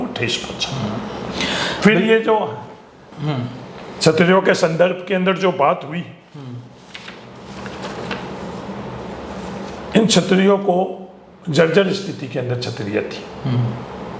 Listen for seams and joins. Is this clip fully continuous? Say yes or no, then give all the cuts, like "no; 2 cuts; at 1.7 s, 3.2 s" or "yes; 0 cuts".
yes; 0 cuts